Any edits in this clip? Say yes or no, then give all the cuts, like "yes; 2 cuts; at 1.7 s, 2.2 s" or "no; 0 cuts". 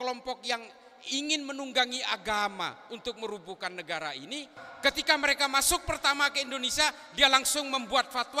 yes; 1 cut; at 4.6 s